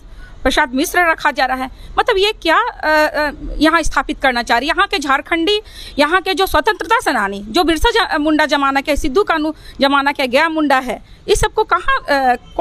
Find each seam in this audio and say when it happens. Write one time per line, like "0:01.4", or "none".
none